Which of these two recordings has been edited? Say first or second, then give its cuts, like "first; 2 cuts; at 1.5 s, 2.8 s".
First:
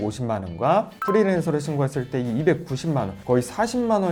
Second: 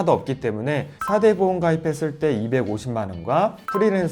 second; 1 cut; at 0.9 s